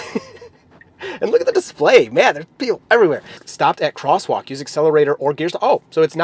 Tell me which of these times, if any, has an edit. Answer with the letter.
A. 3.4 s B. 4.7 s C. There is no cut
A